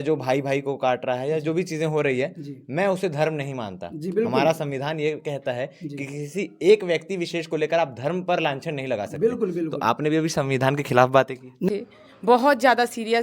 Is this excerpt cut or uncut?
cut